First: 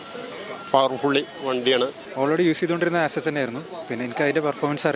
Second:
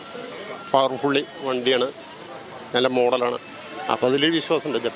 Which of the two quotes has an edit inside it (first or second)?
first